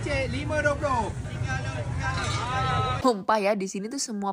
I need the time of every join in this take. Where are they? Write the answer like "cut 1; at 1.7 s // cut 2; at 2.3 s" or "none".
cut 1; at 3.3 s